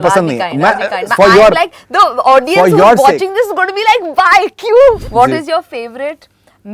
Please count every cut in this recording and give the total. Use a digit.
1